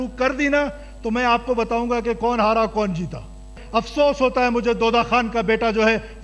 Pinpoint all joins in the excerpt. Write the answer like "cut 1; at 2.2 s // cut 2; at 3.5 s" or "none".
cut 1; at 3.6 s